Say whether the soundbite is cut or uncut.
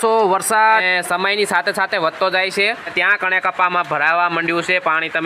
cut